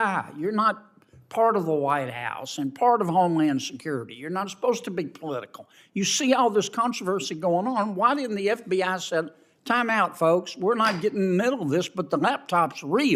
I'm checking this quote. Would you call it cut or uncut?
uncut